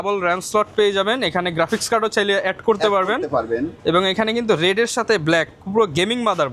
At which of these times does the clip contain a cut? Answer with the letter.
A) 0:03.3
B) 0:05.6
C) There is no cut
C